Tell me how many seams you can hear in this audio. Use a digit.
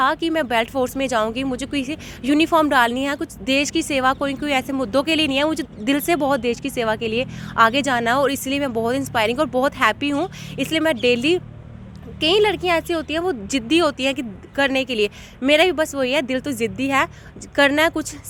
0